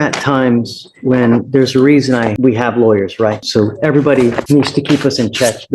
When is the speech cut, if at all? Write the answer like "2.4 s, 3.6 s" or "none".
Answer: 2.3 s, 3.4 s, 4.4 s